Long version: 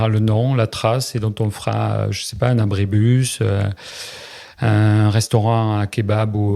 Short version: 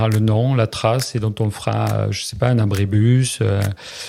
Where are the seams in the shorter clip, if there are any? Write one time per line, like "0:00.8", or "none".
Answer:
none